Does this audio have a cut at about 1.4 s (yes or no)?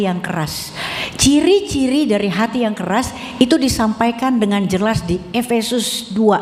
no